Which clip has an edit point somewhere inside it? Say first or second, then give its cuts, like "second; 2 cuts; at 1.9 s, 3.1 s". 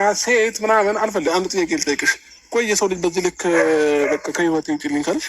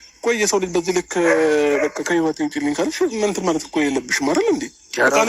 first; 1 cut; at 1.3 s